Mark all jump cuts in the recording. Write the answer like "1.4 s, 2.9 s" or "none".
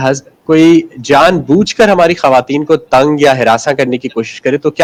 none